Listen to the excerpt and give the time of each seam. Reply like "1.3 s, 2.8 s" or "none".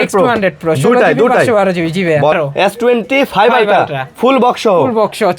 2.3 s